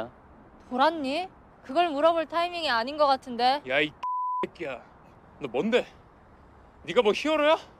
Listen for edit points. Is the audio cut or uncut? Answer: uncut